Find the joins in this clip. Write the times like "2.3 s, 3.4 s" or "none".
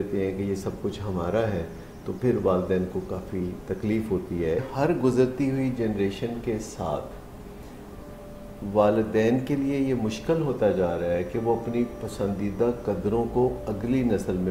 4.7 s